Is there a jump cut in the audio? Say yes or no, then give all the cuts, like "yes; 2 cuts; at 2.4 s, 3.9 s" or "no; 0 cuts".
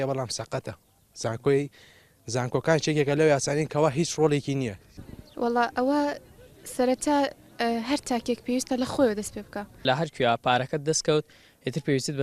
yes; 2 cuts; at 4.8 s, 9.8 s